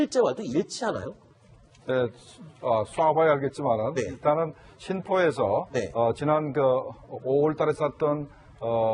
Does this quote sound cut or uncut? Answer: uncut